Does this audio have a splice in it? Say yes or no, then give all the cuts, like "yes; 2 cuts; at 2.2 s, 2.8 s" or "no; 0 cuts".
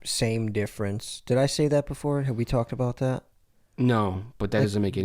no; 0 cuts